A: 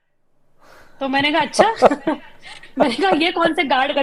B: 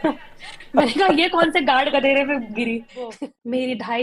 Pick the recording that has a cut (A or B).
B